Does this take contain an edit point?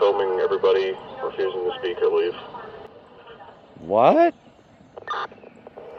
no; 0 cuts

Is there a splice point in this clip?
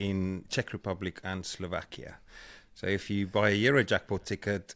no; 0 cuts

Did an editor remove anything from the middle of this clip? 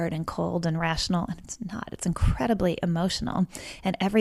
no; 0 cuts

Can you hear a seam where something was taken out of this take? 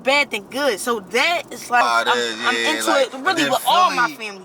yes; 1 cut; at 1.8 s

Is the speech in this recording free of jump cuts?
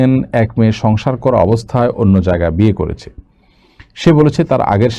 yes; 0 cuts

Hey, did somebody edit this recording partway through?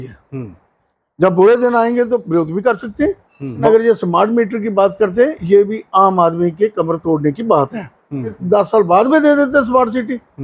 yes; 2 cuts; at 3.6 s, 8.4 s

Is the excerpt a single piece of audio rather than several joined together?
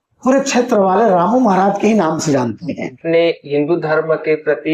no; 1 cut; at 3.0 s

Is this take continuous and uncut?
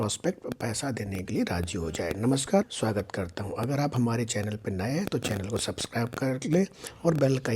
no; 1 cut; at 2.7 s

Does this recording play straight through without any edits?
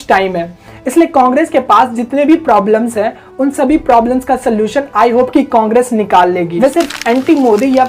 no; 1 cut; at 6.7 s

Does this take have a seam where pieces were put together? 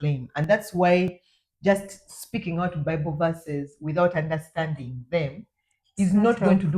no; 0 cuts

